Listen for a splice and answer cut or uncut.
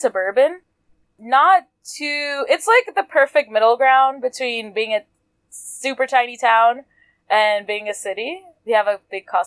cut